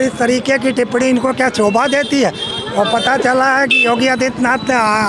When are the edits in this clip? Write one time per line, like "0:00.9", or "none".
none